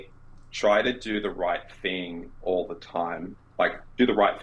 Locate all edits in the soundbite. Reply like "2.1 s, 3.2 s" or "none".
none